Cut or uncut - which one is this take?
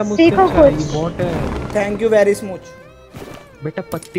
cut